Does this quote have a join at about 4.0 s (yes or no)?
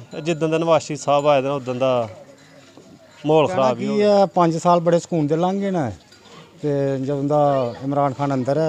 no